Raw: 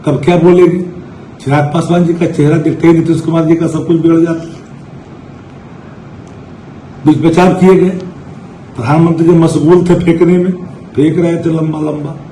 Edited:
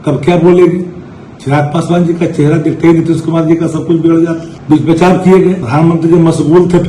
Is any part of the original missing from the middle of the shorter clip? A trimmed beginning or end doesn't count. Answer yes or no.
yes